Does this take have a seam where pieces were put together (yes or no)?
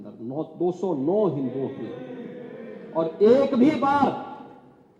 no